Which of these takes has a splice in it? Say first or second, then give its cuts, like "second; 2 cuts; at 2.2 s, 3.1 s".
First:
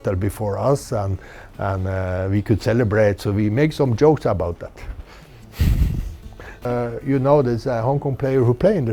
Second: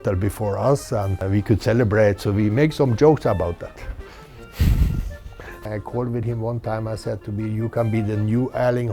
second; 2 cuts; at 1.2 s, 5.6 s